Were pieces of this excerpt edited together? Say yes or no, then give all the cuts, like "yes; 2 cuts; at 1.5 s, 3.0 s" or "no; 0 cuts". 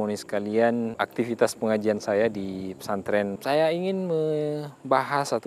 yes; 1 cut; at 3.4 s